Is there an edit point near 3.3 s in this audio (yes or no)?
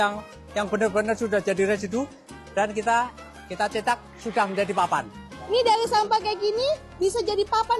no